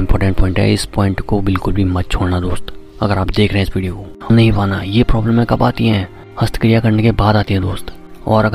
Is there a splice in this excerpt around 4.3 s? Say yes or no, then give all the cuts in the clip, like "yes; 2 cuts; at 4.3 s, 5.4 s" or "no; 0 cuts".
yes; 1 cut; at 4.3 s